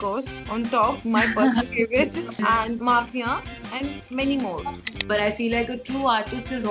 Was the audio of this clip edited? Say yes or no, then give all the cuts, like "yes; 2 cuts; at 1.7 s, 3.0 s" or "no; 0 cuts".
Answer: yes; 1 cut; at 4.9 s